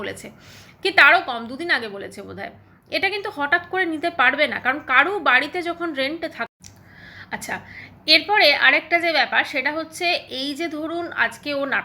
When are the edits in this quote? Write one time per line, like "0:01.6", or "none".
0:06.5